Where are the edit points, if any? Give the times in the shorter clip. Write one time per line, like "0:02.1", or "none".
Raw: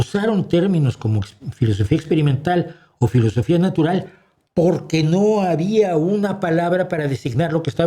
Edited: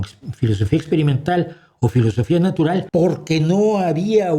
0:02.9